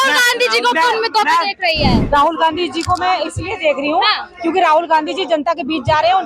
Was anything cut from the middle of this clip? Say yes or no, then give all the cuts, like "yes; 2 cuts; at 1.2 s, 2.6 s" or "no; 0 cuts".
yes; 1 cut; at 2.0 s